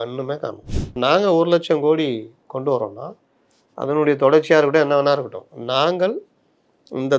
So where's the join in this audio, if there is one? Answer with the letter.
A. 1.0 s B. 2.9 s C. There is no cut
A